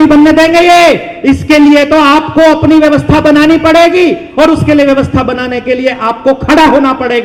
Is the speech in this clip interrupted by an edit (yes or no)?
no